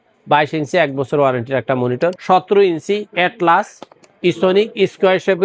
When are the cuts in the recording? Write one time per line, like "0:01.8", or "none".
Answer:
0:02.2